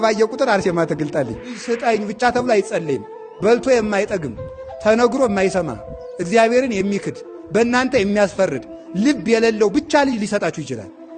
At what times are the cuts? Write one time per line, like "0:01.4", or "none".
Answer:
0:01.6